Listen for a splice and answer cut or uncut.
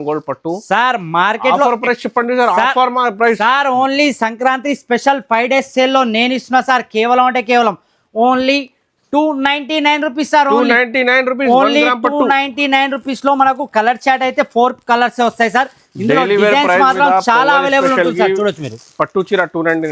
uncut